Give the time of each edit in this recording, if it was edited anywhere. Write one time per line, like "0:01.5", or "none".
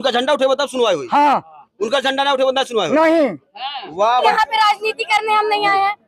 0:04.2